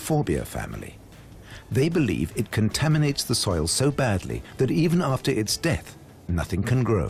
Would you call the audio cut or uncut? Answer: uncut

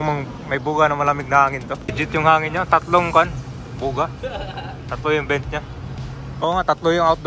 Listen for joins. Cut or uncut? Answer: cut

